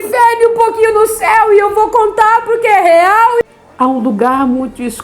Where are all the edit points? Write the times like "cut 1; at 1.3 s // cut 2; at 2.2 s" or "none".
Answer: cut 1; at 3.4 s